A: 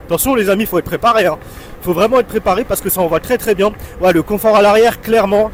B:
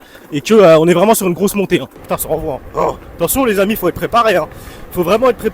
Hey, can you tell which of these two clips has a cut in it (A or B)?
B